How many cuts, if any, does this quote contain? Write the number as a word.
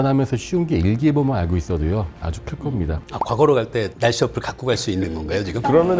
one